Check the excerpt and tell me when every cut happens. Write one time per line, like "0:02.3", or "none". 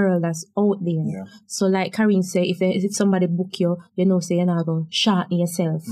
none